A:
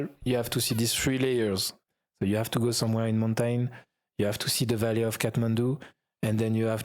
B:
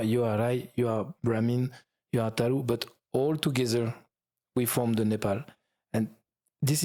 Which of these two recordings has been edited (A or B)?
A